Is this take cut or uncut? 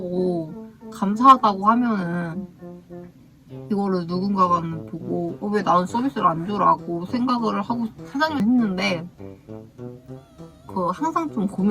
cut